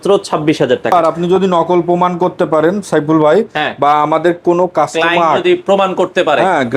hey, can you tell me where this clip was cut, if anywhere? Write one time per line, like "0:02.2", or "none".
0:01.2